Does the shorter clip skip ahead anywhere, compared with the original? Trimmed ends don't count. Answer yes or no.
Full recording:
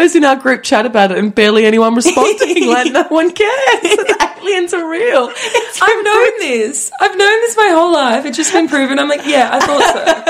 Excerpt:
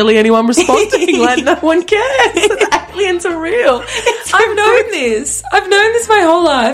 no